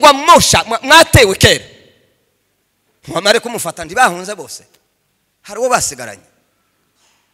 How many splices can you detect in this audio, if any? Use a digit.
0